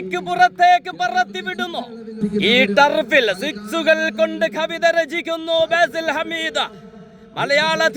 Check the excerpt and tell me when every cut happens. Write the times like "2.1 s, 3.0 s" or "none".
2.2 s